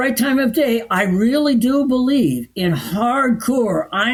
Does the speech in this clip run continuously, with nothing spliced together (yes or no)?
yes